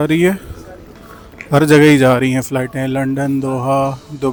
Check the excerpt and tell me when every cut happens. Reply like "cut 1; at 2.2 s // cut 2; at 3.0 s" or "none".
none